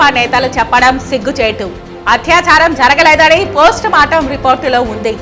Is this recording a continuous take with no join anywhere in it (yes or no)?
yes